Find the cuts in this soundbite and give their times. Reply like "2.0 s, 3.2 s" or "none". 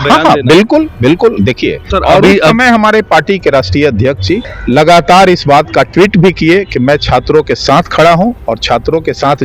1.9 s, 4.5 s